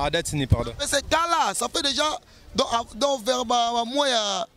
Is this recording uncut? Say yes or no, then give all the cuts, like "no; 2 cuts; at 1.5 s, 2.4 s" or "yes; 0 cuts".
yes; 0 cuts